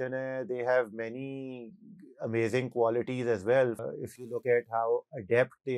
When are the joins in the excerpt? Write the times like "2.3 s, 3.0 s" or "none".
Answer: 3.8 s